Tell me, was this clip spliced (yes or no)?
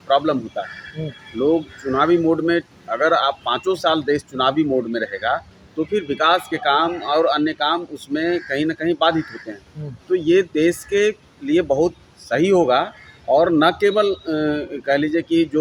no